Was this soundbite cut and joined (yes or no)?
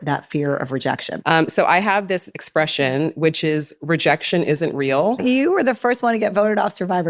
yes